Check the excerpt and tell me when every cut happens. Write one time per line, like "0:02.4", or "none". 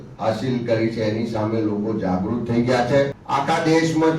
0:03.2